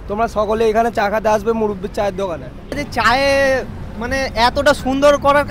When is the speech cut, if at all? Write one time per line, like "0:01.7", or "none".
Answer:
0:02.8